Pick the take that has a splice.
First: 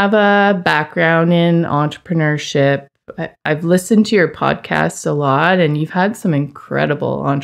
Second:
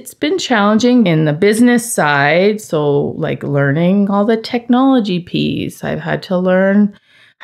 second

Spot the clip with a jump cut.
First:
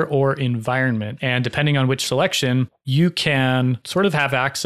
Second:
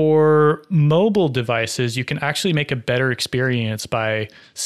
first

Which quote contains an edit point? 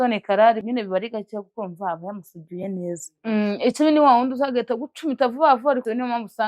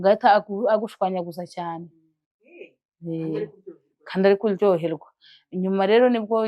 second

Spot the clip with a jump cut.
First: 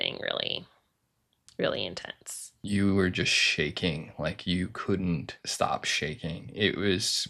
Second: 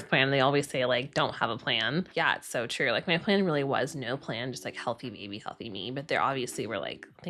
first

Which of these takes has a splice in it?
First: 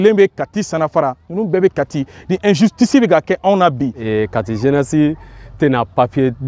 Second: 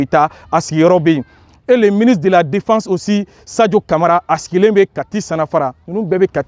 first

